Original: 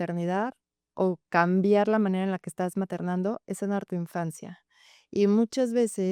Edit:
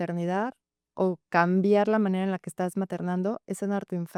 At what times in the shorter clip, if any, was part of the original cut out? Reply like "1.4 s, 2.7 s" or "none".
none